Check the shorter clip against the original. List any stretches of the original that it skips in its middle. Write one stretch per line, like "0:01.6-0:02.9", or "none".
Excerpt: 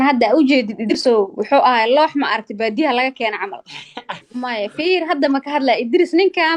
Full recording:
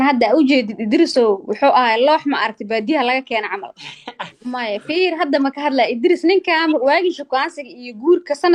0:01.0-0:01.1